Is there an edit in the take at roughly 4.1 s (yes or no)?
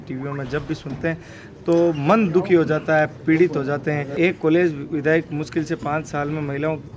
yes